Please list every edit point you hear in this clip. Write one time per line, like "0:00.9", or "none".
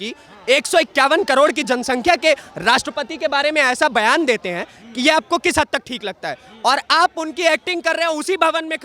none